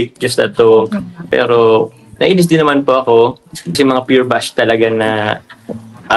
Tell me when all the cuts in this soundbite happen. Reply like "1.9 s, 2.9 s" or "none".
1.3 s, 3.7 s